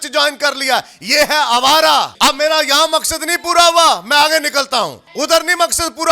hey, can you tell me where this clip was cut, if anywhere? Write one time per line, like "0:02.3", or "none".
0:02.1
0:05.0